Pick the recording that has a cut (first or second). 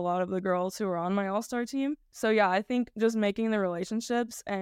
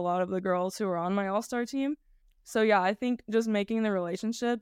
first